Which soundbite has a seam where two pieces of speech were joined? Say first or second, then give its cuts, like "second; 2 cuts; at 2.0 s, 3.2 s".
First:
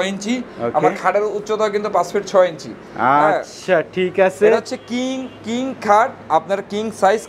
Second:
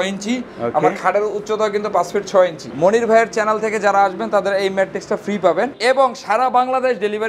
second; 2 cuts; at 2.7 s, 5.8 s